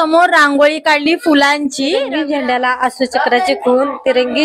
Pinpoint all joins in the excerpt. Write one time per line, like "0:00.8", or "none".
0:02.0